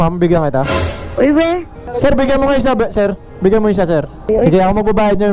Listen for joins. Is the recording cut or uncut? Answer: cut